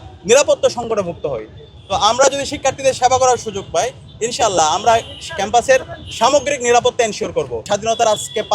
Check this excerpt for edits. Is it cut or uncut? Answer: cut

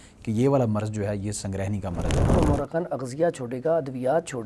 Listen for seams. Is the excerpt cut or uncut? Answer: cut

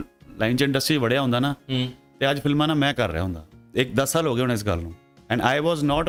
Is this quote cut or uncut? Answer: uncut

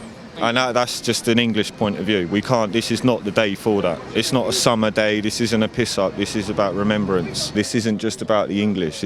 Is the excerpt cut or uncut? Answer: cut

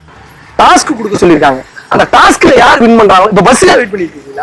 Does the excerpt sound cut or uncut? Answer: uncut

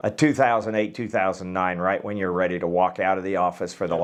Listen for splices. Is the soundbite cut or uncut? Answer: uncut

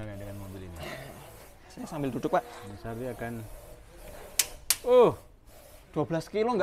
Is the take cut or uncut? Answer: uncut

